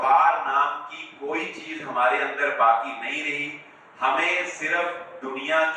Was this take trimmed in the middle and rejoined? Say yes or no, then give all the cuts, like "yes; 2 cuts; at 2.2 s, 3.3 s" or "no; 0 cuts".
no; 0 cuts